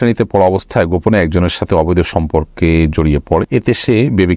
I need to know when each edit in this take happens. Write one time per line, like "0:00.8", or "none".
0:03.5